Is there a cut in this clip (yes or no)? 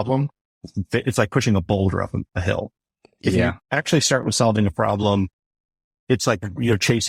no